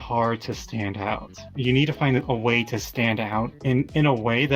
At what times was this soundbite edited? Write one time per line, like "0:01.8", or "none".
0:01.5
0:03.6